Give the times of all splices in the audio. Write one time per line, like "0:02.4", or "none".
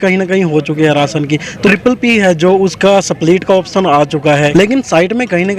0:01.7
0:04.5

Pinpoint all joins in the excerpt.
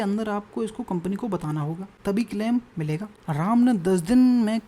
0:01.9
0:03.1

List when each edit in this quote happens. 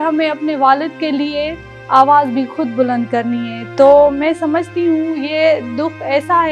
none

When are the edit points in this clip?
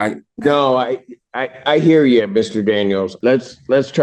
0:03.1

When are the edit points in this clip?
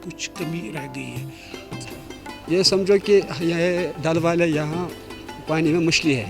0:01.7

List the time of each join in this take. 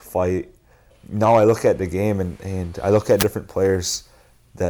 0:01.0

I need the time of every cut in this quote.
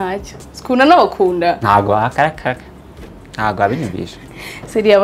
none

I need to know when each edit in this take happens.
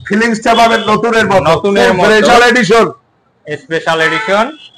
0:02.3

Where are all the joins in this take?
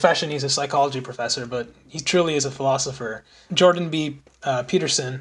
0:03.5

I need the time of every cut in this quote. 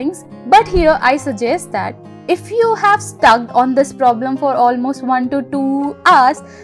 none

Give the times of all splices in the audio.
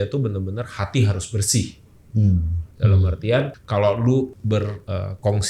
0:02.6
0:03.6
0:04.5

